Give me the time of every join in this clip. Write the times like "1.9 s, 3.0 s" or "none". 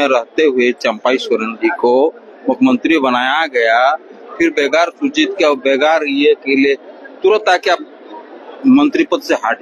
none